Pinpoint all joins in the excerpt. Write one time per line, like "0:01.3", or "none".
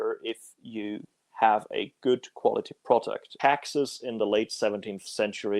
0:03.2